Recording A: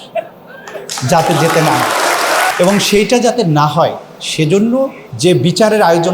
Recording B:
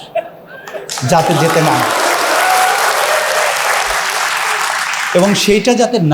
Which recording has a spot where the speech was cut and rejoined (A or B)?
A